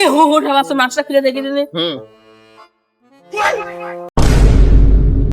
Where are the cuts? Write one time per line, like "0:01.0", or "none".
0:04.1